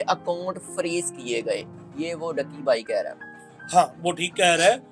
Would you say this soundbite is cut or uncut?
uncut